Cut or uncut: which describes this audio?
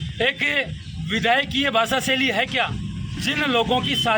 cut